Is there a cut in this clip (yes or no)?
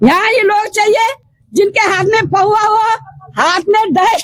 no